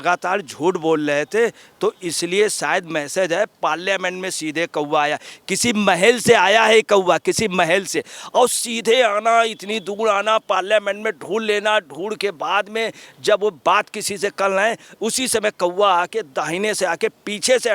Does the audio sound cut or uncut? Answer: uncut